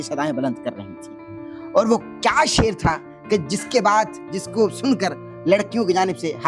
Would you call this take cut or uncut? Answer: uncut